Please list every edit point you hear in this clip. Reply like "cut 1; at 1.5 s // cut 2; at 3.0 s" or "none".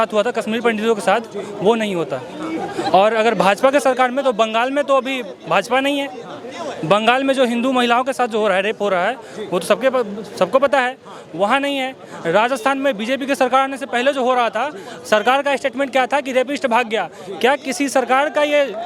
none